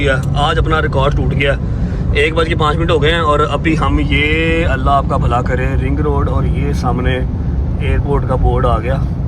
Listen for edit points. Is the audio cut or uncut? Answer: uncut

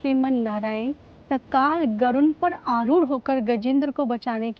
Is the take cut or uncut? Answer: uncut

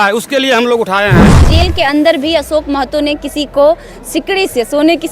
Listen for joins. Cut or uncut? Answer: cut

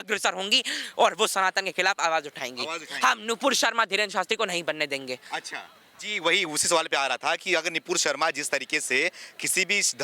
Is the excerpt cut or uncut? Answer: uncut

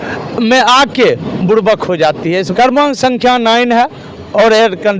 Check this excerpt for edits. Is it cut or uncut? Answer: cut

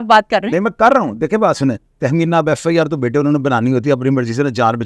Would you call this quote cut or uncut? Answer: cut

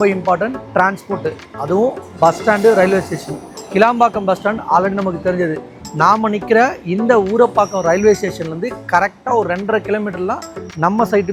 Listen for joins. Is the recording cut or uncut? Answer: uncut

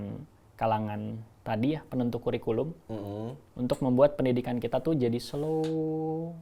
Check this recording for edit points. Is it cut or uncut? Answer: uncut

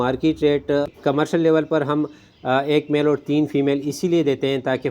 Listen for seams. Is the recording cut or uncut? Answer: cut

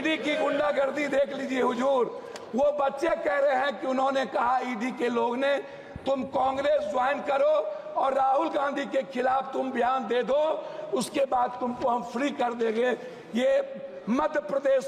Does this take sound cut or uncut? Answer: uncut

